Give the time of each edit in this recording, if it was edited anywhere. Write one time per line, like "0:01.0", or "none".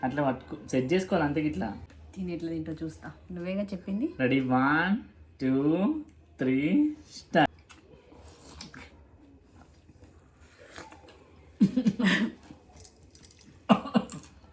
0:01.8
0:07.5